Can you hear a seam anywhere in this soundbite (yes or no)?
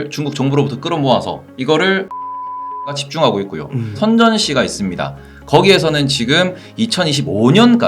yes